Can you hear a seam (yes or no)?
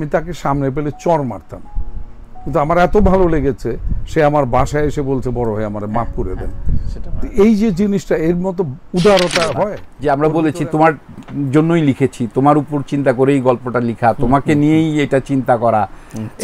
yes